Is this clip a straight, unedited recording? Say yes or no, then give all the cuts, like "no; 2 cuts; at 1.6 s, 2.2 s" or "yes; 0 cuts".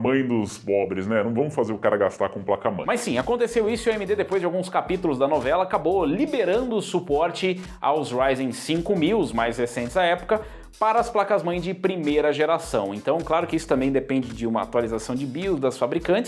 yes; 0 cuts